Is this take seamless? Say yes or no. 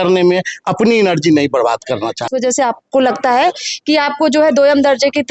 no